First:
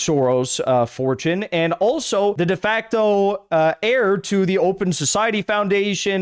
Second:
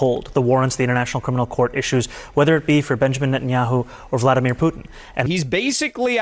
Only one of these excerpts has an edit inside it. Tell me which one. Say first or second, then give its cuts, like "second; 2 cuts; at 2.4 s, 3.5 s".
second; 1 cut; at 5.1 s